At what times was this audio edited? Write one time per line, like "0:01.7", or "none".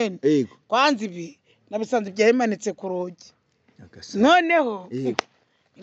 none